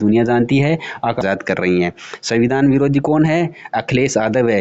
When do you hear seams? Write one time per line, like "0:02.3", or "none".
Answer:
0:01.2